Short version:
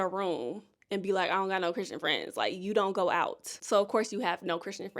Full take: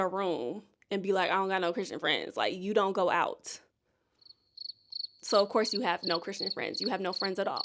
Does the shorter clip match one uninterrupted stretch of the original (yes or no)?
no